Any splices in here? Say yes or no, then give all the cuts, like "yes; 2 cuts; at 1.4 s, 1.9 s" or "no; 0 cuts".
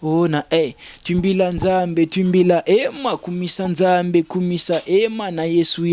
no; 0 cuts